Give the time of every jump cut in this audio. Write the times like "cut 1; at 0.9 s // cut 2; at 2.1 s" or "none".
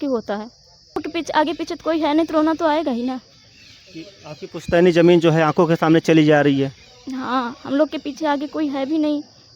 cut 1; at 1.0 s